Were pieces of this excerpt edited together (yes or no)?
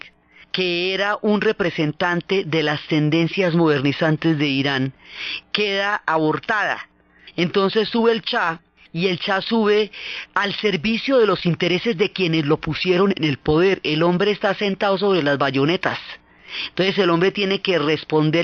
no